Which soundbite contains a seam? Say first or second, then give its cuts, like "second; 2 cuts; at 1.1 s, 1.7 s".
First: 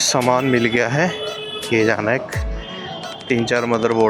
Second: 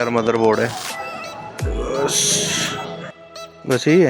second; 1 cut; at 3.0 s